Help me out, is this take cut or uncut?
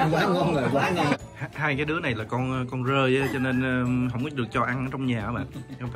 cut